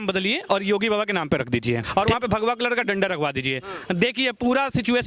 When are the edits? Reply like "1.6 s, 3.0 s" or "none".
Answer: 1.9 s